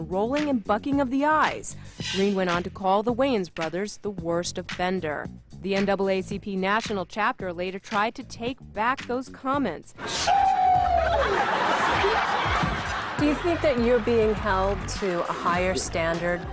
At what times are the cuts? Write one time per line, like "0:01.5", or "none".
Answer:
none